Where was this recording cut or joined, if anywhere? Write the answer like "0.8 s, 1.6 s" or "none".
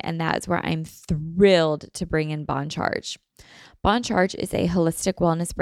none